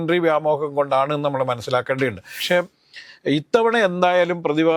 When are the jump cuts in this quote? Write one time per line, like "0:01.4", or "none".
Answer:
0:02.3

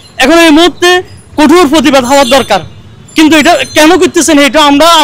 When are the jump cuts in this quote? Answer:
none

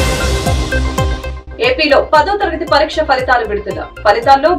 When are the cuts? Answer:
0:01.1

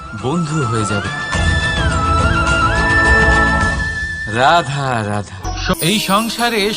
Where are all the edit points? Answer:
0:05.7

